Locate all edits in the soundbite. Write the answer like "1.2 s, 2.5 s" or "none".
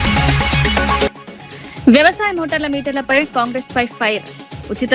1.1 s